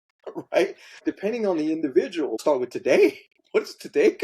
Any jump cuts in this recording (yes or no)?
yes